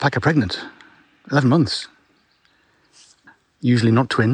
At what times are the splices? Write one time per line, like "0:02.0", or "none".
0:03.2